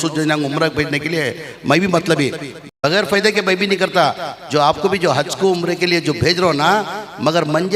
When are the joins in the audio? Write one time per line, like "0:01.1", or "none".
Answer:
0:02.6